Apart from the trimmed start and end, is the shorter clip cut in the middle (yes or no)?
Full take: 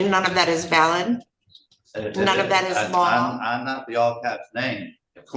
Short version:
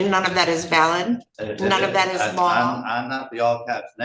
yes